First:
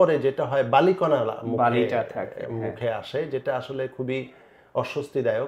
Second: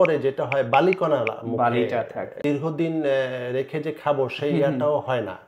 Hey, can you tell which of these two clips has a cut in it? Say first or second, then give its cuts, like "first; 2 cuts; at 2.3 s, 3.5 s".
second; 1 cut; at 2.4 s